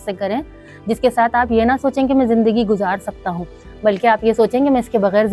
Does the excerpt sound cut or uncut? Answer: uncut